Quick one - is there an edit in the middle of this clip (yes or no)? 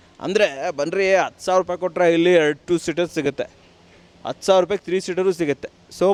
no